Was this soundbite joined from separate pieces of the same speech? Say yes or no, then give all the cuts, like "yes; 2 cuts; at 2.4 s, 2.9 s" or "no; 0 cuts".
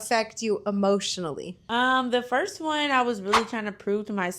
yes; 1 cut; at 1.5 s